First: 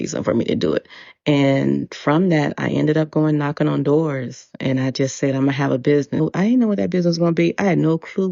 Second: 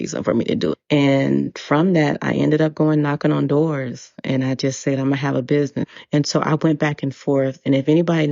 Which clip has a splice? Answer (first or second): second